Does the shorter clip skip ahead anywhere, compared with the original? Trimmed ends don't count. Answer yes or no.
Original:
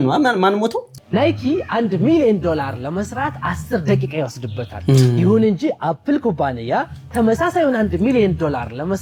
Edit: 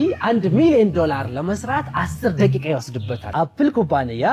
yes